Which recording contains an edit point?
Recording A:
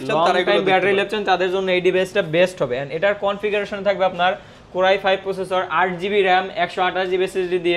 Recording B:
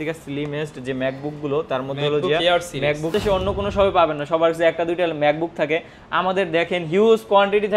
B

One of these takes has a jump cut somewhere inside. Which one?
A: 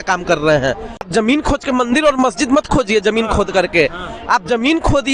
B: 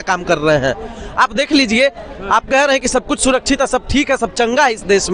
A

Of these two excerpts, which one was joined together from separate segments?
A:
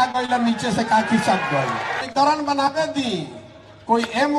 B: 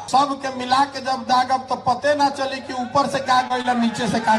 A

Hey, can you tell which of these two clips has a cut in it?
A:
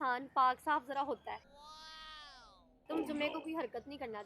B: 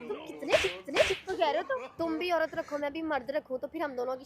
B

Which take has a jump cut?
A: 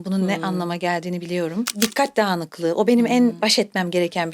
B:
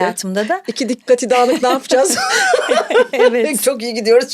A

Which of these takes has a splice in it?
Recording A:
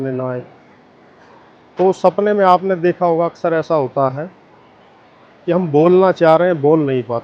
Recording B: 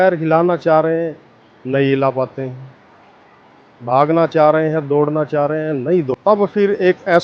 B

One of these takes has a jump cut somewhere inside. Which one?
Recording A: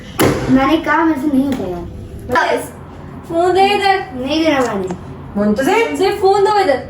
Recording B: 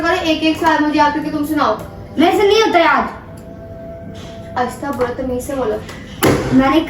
A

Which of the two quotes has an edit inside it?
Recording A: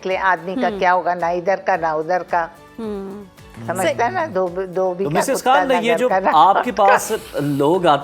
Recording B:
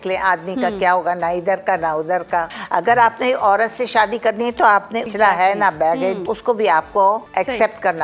B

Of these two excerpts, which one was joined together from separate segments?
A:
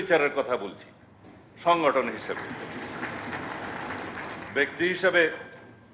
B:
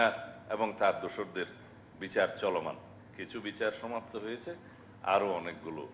A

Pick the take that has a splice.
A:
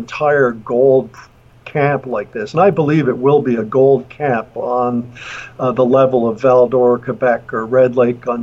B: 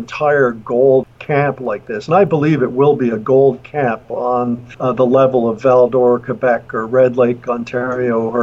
B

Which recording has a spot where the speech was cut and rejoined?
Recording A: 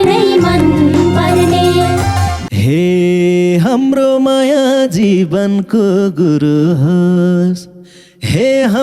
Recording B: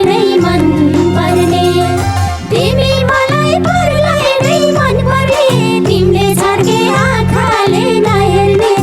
A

